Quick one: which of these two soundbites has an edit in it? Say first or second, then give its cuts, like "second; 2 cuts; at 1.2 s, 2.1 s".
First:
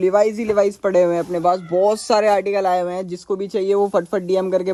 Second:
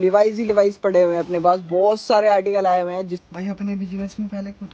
second; 1 cut; at 3.1 s